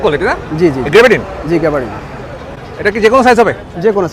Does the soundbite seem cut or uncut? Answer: uncut